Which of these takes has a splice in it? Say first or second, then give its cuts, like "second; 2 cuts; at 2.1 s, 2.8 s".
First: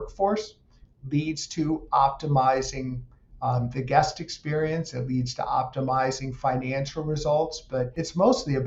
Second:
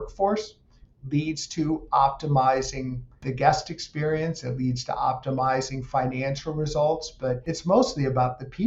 second; 1 cut; at 3.2 s